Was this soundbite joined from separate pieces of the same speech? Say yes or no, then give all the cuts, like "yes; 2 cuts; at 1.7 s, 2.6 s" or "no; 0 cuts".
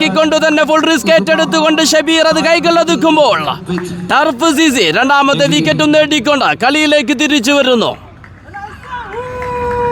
no; 0 cuts